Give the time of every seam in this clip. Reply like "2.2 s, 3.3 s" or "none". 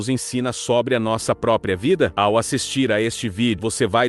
2.1 s